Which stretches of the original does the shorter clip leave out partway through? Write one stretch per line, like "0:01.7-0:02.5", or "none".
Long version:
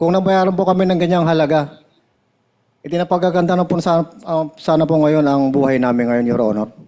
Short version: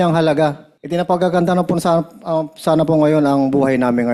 0:02.2-0:03.1